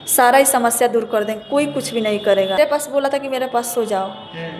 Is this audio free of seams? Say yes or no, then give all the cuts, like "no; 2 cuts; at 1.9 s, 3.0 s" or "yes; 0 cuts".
no; 1 cut; at 2.5 s